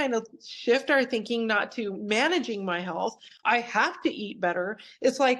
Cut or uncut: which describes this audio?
uncut